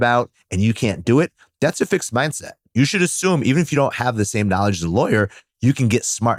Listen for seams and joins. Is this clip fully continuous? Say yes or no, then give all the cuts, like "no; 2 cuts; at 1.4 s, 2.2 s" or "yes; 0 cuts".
yes; 0 cuts